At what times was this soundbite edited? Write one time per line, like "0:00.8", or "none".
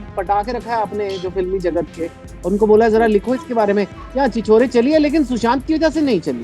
none